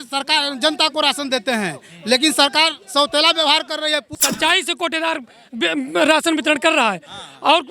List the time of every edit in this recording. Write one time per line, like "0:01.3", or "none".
0:04.1